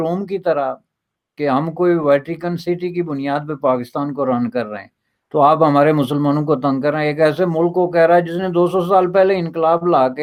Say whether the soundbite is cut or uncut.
uncut